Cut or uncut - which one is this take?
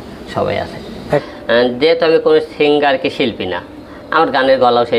cut